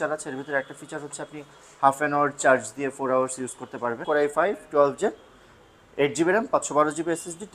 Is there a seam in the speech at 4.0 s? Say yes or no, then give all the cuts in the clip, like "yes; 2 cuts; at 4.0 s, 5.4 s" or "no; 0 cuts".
yes; 1 cut; at 4.0 s